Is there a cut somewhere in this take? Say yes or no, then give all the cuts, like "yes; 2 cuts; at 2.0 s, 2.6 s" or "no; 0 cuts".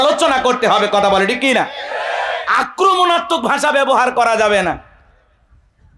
no; 0 cuts